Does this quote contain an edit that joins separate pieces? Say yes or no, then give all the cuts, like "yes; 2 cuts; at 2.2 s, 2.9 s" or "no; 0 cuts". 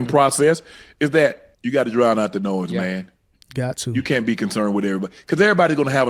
yes; 1 cut; at 1.5 s